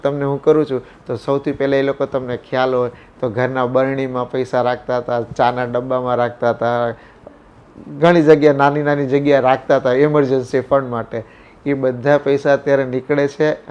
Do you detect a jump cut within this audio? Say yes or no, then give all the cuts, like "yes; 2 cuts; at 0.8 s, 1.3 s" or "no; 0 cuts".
no; 0 cuts